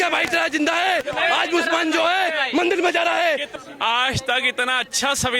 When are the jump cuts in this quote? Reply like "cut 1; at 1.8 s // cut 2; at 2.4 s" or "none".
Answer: cut 1; at 3.5 s